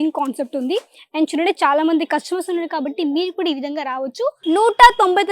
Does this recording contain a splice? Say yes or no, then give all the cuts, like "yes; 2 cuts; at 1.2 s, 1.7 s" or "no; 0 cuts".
yes; 1 cut; at 4.3 s